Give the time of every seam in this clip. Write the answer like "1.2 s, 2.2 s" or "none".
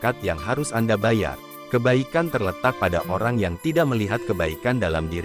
1.5 s